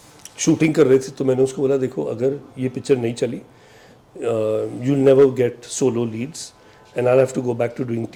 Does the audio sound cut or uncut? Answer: uncut